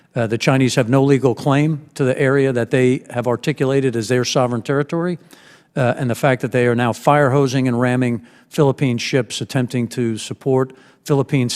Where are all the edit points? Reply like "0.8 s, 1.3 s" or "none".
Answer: none